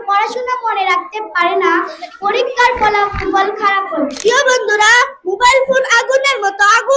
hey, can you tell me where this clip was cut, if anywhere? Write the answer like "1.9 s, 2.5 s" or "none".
4.2 s